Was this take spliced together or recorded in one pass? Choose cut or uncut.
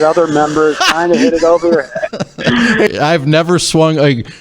cut